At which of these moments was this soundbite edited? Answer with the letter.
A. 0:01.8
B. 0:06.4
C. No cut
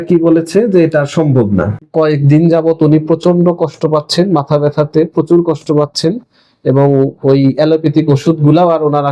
A